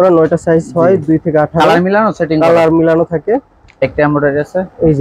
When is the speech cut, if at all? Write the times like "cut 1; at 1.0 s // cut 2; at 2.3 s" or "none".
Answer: cut 1; at 3.8 s